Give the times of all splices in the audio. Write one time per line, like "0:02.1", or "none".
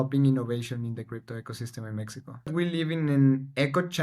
0:02.5